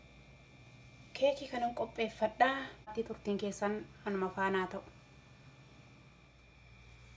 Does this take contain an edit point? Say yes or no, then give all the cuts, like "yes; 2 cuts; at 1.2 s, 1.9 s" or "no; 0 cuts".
yes; 1 cut; at 2.9 s